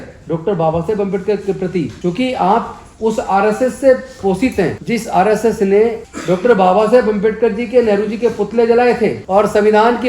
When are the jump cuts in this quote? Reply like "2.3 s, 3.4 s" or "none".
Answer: 1.9 s, 4.8 s, 6.1 s, 9.2 s